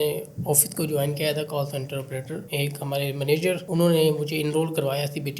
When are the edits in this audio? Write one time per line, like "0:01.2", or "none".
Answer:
0:02.4

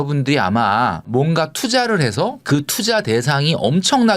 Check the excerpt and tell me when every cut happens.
0:01.1

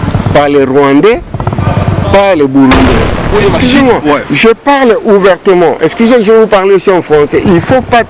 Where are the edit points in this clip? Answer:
0:03.2

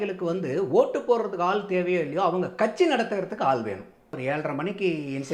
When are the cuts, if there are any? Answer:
0:04.2

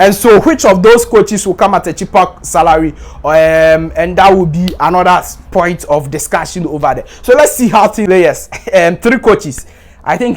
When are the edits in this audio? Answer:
0:08.0

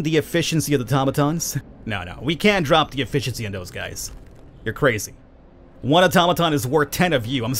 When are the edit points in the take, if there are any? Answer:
0:01.6

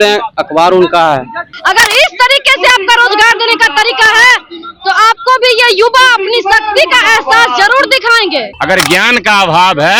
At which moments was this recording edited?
0:01.5
0:08.5

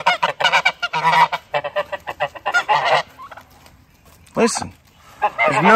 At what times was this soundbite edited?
none

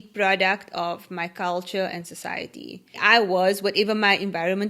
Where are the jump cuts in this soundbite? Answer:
0:03.0

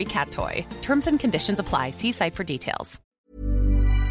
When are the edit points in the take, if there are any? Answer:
0:03.0

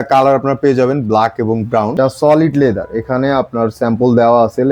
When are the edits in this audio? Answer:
0:01.9

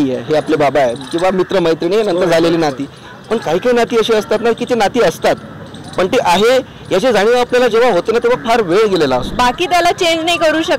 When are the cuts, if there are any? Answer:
0:09.3

